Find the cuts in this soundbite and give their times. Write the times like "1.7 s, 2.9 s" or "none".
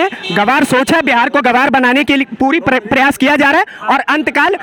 none